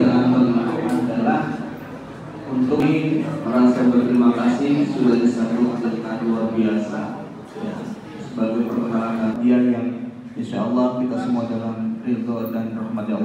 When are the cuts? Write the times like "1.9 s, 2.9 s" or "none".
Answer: 2.8 s, 9.4 s